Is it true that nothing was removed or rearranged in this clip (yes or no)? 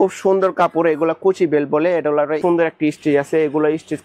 no